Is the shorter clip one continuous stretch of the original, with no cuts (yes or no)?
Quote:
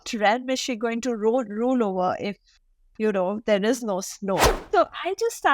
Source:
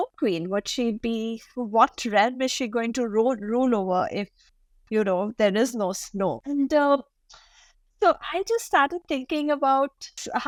no